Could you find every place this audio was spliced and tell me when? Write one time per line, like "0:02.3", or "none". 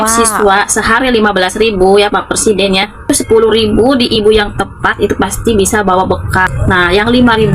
0:03.1
0:06.5